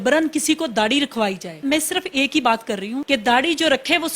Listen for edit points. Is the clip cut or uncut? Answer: cut